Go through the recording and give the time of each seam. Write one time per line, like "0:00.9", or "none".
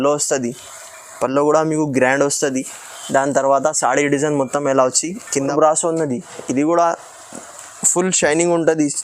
0:05.5